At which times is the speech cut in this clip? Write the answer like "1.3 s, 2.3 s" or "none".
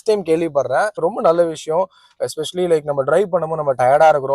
1.0 s

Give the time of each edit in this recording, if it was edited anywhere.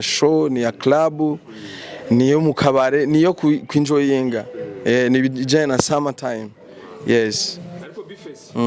none

